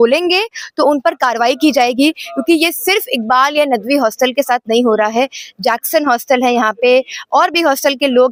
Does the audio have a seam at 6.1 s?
no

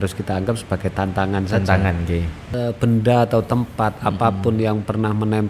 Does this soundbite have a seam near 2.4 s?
yes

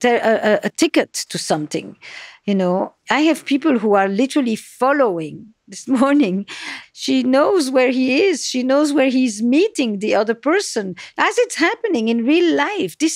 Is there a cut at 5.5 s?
no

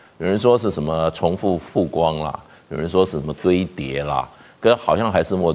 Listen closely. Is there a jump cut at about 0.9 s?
no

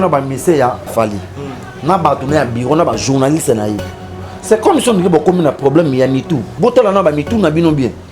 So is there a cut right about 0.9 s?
yes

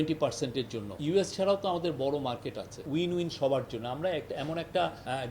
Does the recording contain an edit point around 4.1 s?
no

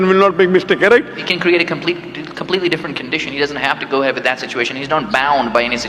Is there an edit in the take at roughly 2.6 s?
no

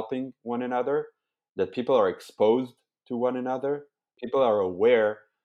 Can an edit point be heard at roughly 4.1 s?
yes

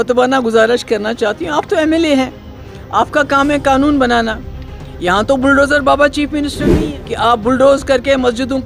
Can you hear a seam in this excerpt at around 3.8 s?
no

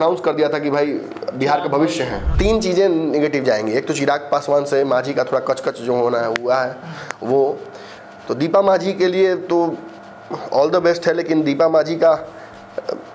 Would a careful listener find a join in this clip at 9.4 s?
no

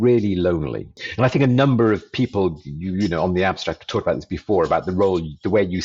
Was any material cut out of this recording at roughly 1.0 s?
yes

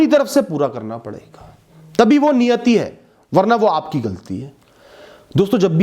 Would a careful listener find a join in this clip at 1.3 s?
no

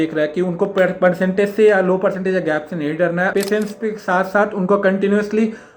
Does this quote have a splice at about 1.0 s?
no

